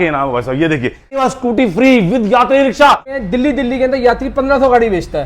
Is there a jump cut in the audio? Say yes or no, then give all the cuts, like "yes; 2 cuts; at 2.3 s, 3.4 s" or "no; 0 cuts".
yes; 2 cuts; at 1.2 s, 3.2 s